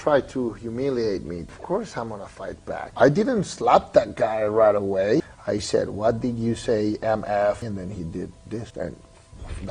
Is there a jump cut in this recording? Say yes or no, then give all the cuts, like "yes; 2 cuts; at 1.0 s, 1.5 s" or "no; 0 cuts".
yes; 5 cuts; at 1.6 s, 2.9 s, 5.2 s, 7.6 s, 8.7 s